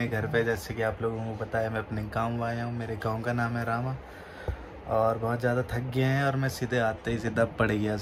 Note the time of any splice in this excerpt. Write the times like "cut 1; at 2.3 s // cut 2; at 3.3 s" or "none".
none